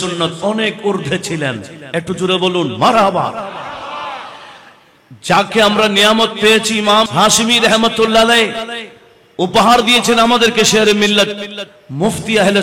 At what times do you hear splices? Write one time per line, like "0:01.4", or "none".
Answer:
0:07.1